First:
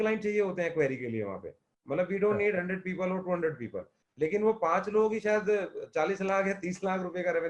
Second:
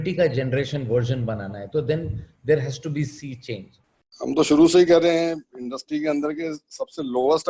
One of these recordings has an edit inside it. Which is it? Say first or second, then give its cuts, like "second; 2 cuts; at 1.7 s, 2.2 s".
second; 1 cut; at 3.9 s